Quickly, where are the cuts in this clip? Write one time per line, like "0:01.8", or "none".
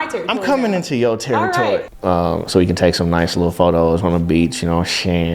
0:01.9